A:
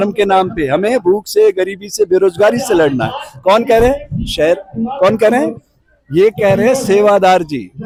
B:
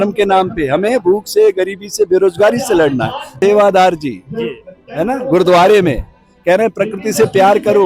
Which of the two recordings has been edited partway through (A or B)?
B